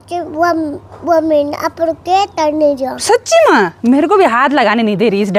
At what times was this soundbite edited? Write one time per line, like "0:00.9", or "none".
none